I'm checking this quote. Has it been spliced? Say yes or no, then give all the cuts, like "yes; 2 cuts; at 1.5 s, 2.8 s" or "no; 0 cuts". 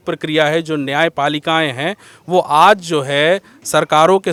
no; 0 cuts